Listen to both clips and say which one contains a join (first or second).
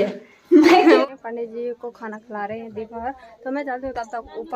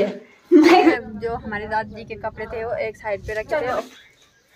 second